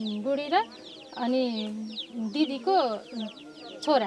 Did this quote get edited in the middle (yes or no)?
no